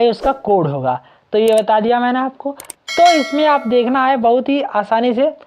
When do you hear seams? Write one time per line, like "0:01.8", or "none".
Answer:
none